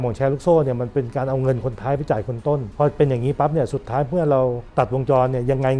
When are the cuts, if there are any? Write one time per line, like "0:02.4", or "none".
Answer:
0:02.7
0:04.6